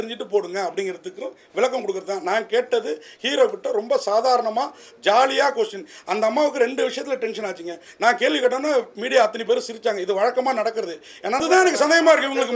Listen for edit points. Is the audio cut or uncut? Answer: cut